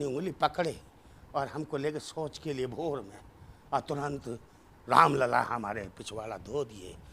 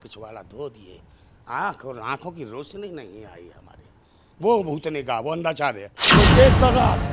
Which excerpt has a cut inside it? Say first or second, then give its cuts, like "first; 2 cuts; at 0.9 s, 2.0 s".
second; 1 cut; at 6.0 s